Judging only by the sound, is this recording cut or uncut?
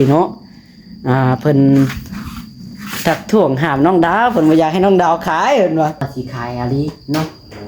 cut